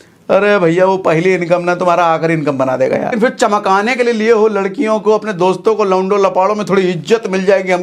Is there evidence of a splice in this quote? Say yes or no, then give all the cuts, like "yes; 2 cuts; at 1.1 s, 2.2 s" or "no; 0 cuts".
yes; 1 cut; at 3.1 s